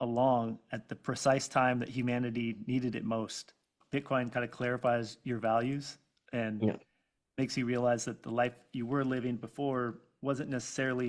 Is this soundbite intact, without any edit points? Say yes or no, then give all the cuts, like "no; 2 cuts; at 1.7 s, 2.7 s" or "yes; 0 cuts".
no; 1 cut; at 3.7 s